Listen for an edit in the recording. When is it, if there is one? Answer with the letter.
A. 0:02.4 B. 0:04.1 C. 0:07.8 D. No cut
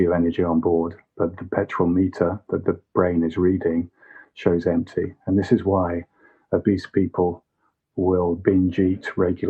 D